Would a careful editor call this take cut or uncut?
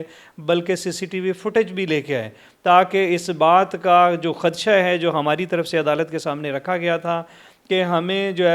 uncut